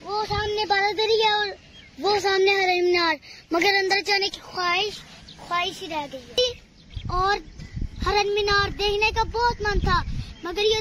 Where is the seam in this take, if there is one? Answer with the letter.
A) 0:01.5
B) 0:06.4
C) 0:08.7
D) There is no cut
B